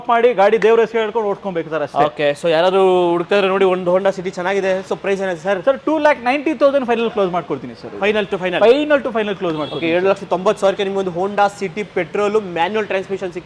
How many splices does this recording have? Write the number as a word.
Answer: zero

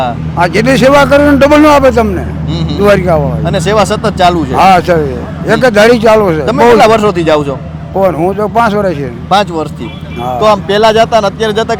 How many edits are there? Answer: zero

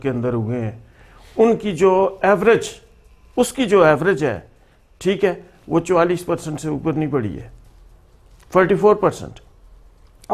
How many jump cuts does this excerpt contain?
zero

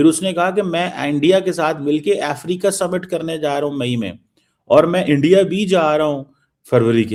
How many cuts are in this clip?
zero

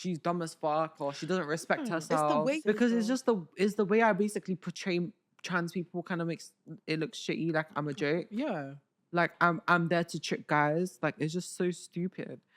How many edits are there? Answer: one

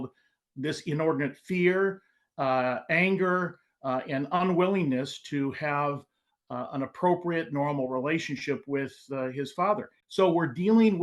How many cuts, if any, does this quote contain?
two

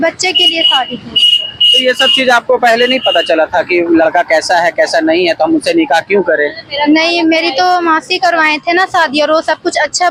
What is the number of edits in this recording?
zero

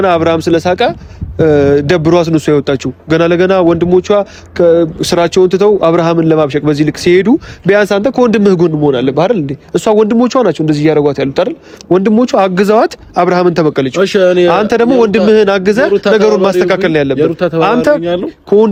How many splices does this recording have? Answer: zero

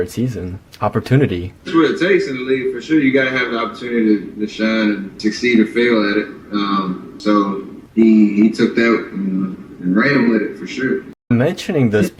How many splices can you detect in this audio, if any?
zero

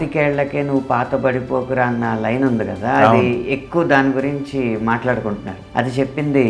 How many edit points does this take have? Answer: one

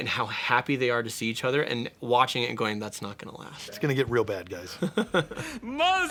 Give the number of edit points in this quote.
zero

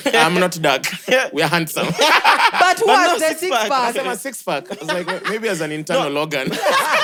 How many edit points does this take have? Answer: zero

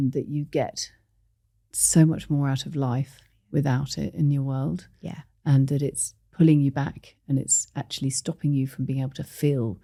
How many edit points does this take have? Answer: zero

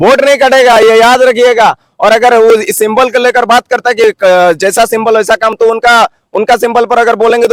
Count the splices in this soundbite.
zero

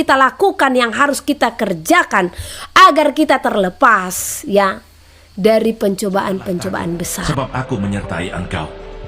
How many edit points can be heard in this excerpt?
one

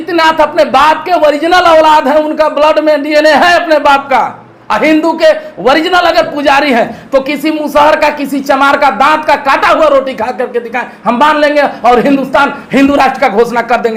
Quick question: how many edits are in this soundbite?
zero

